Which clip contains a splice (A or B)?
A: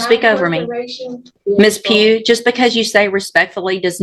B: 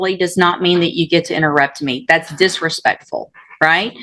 A